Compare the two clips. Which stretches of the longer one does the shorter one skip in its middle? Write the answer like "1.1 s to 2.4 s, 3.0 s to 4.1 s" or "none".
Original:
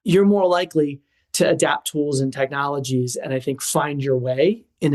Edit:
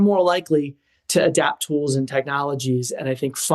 none